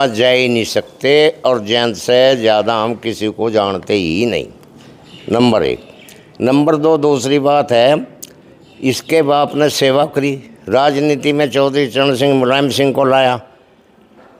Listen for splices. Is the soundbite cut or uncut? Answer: uncut